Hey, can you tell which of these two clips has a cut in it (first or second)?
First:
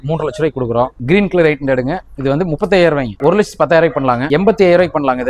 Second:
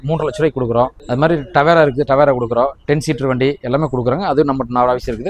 first